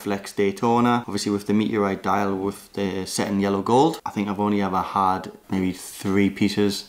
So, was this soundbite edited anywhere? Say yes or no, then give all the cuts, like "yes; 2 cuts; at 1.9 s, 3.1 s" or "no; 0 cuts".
no; 0 cuts